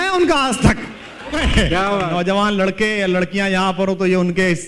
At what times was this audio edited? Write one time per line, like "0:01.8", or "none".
0:01.4